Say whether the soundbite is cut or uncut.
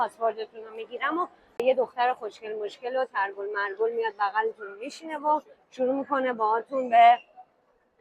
cut